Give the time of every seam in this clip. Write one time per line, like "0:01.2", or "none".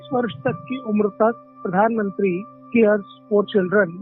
0:02.5